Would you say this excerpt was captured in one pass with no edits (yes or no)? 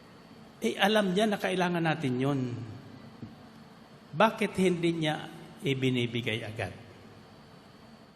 yes